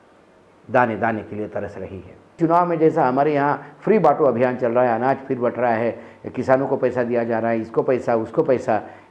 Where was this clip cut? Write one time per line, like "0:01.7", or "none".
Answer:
0:02.4

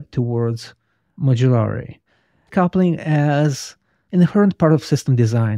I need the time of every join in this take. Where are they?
0:02.5

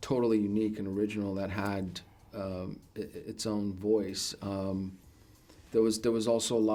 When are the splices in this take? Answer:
none

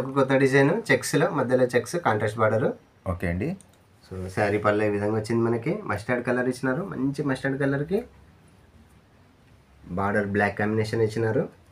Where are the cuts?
none

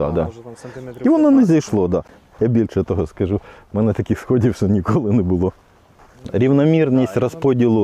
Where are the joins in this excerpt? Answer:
0:02.1
0:06.2

